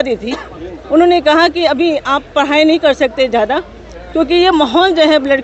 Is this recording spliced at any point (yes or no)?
no